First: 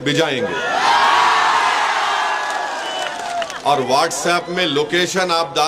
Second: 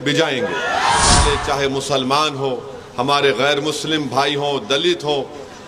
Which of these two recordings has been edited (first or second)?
second